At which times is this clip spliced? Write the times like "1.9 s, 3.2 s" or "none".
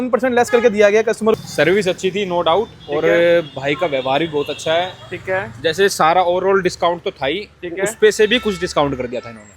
1.4 s